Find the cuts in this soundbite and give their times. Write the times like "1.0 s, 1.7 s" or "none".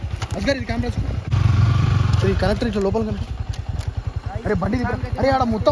1.3 s